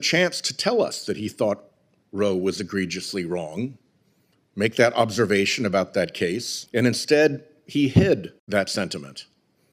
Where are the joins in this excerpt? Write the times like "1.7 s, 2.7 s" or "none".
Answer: 6.5 s, 8.4 s